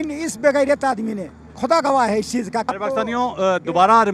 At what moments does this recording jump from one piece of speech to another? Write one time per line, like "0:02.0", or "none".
0:02.7